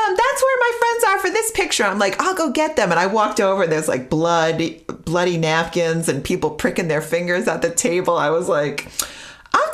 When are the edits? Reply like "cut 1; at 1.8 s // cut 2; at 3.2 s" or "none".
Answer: none